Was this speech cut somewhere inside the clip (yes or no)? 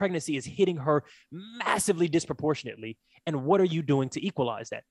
no